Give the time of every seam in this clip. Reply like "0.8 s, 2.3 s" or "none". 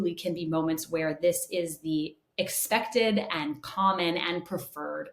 none